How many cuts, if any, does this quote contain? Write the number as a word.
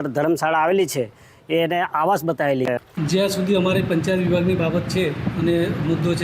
one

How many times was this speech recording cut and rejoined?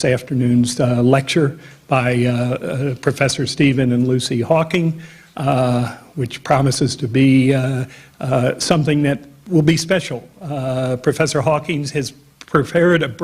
one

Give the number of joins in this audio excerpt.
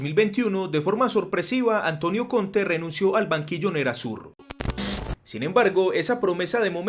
one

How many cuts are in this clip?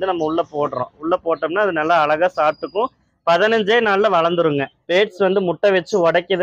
one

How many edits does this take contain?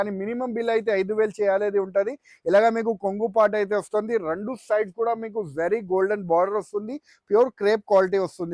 zero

